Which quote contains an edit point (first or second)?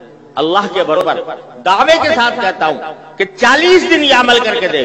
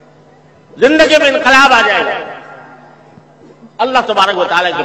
first